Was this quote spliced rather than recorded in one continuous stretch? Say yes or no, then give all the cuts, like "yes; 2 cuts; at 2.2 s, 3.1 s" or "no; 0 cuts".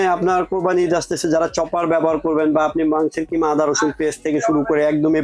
no; 0 cuts